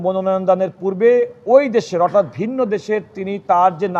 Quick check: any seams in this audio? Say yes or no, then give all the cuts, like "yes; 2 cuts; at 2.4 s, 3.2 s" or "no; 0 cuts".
no; 0 cuts